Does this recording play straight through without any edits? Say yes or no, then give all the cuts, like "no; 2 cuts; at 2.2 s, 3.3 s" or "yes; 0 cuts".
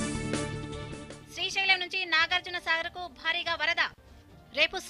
no; 1 cut; at 1.1 s